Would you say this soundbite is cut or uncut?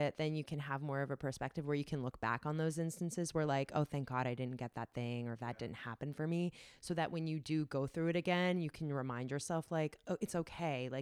uncut